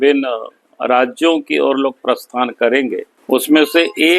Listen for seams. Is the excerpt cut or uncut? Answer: cut